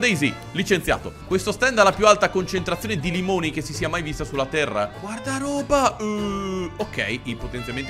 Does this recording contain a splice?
yes; 2 cuts; at 1.1 s, 5.0 s

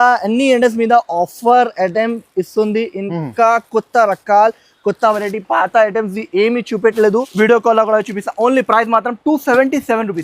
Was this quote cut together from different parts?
yes; 1 cut; at 7.3 s

